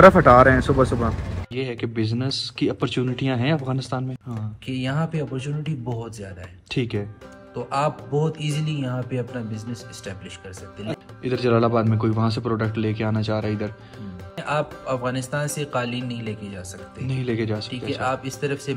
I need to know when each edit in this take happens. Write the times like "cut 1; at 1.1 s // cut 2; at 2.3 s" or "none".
cut 1; at 1.5 s // cut 2; at 4.2 s // cut 3; at 11.0 s // cut 4; at 14.4 s

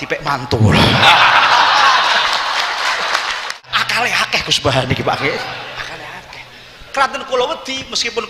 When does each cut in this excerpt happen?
cut 1; at 3.7 s

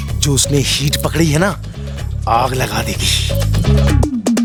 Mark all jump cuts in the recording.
none

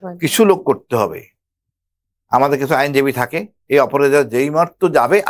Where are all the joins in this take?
none

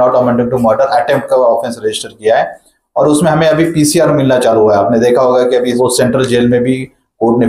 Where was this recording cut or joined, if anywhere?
cut 1; at 5.7 s

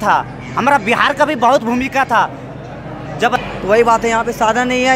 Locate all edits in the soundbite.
cut 1; at 3.4 s

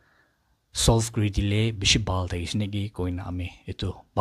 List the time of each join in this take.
none

